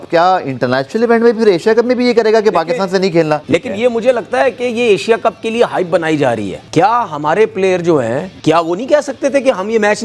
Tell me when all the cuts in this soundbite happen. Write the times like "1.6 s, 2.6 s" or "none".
3.4 s, 6.6 s, 8.3 s